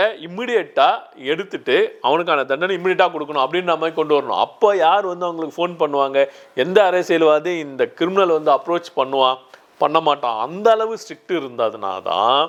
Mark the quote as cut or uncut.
uncut